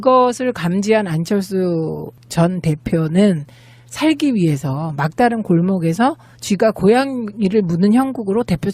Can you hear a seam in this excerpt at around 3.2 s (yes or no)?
yes